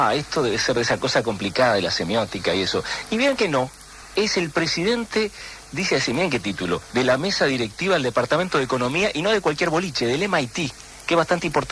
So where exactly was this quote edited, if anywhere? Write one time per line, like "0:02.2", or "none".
0:08.3